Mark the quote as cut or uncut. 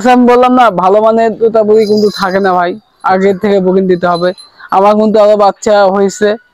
uncut